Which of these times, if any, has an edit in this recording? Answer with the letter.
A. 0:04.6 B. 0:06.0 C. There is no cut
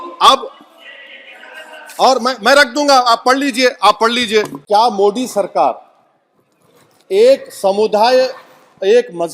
A